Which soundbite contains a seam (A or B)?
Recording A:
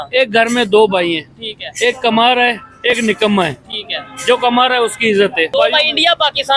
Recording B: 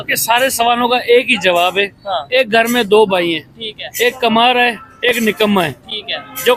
A